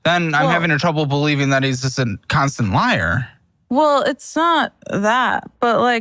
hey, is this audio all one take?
yes; 0 cuts

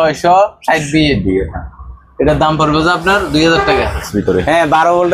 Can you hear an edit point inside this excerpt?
yes; 1 cut; at 4.1 s

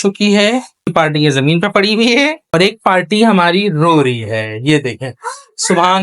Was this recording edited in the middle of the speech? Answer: yes; 2 cuts; at 0.9 s, 2.5 s

